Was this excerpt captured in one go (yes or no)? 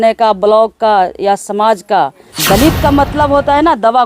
no